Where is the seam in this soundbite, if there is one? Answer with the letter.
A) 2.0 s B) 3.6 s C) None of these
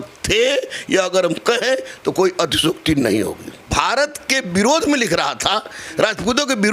B